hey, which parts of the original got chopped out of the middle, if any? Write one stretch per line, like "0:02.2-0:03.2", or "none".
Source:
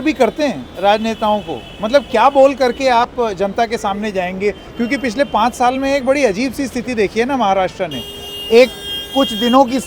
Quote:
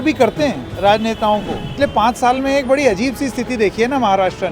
0:01.7-0:05.1